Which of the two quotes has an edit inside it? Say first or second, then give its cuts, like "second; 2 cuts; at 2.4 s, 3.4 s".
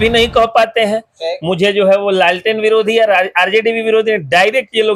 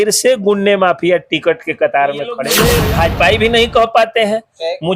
second; 1 cut; at 2.4 s